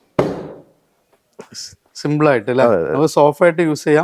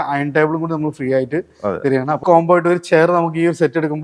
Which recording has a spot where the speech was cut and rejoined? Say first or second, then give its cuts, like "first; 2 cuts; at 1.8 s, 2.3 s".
second; 1 cut; at 2.2 s